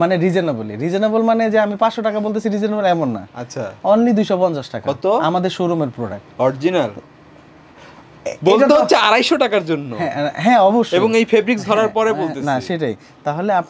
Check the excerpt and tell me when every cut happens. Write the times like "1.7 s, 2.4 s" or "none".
none